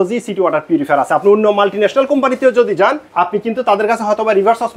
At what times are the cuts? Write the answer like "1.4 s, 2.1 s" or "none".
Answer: 3.0 s